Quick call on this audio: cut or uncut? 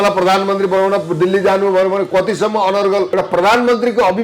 cut